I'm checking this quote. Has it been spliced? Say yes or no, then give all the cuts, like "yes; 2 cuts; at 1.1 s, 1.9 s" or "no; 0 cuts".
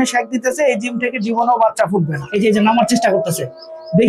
yes; 1 cut; at 2.2 s